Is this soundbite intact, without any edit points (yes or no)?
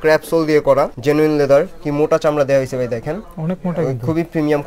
no